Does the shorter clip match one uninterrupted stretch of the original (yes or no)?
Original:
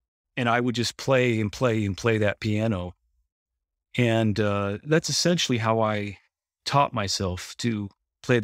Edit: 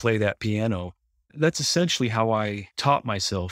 no